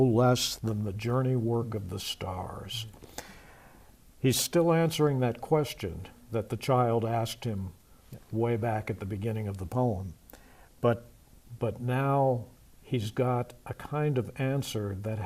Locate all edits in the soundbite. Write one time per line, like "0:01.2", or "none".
none